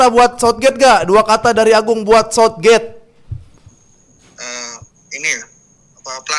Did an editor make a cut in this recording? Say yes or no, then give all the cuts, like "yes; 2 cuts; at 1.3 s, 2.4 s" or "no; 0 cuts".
no; 0 cuts